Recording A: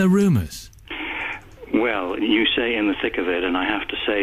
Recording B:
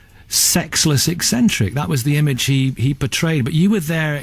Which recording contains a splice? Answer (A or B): B